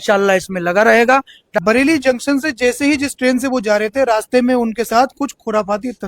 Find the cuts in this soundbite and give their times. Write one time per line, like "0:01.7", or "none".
0:01.4

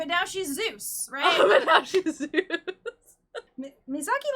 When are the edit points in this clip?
0:03.3

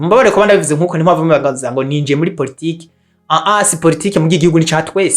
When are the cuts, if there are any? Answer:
none

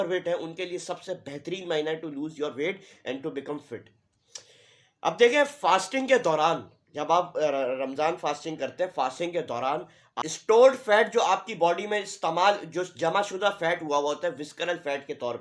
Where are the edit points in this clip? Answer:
none

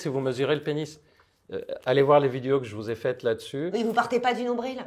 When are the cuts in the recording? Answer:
none

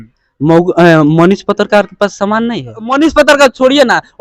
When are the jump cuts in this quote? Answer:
0:02.9

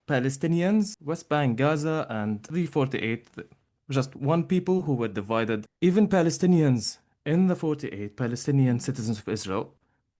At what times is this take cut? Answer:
0:01.0
0:02.4
0:05.7

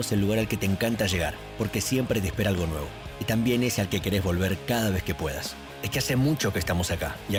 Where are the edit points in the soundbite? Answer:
none

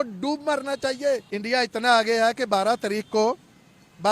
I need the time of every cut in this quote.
0:01.3

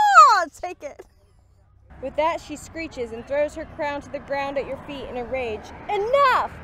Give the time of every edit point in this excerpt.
0:01.9

